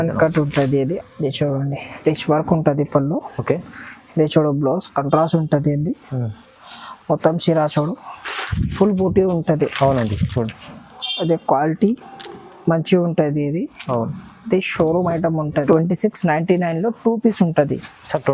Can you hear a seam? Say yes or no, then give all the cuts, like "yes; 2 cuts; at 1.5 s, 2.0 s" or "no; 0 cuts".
yes; 2 cuts; at 1.0 s, 15.6 s